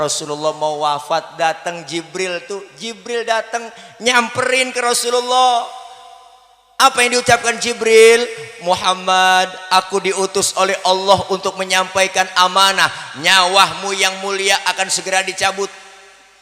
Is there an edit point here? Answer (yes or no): no